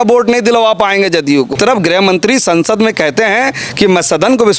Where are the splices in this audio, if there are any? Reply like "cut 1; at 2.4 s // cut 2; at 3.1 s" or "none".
cut 1; at 1.5 s